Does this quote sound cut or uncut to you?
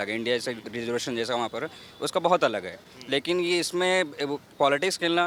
uncut